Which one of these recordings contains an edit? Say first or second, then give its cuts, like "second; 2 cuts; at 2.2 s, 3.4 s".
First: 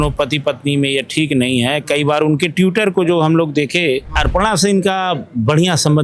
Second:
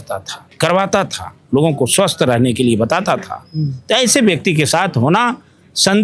first; 1 cut; at 4.2 s